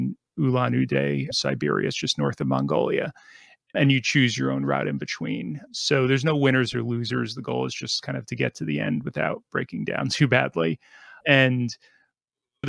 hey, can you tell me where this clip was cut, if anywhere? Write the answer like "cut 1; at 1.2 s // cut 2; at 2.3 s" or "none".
none